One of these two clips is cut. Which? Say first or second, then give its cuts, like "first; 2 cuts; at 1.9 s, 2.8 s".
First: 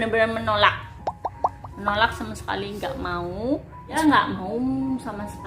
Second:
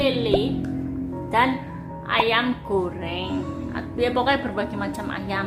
first; 1 cut; at 3.9 s